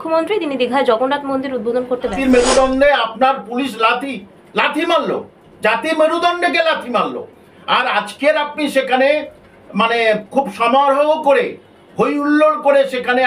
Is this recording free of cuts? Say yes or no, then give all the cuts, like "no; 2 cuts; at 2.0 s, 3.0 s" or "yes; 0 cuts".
no; 1 cut; at 2.2 s